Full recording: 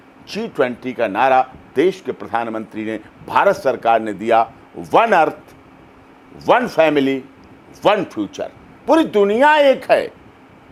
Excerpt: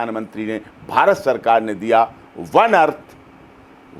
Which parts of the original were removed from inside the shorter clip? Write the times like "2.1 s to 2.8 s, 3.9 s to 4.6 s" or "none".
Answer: none